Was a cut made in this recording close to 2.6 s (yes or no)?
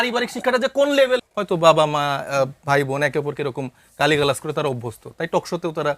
no